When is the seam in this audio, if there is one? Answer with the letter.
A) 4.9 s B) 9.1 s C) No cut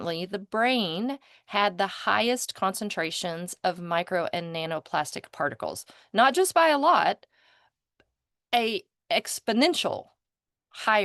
C